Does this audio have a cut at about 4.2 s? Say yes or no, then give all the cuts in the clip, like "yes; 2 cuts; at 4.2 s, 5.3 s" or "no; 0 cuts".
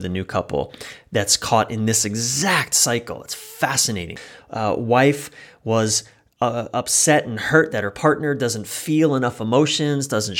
yes; 1 cut; at 4.2 s